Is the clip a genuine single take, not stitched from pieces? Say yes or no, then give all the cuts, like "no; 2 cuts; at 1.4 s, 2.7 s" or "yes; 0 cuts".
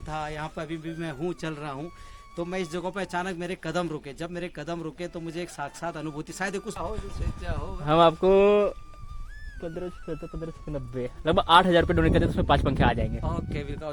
no; 1 cut; at 6.8 s